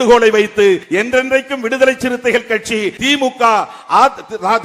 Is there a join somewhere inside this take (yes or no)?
yes